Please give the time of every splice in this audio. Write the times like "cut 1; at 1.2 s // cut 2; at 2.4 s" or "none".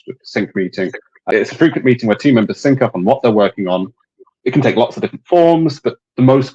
cut 1; at 1.3 s // cut 2; at 4.3 s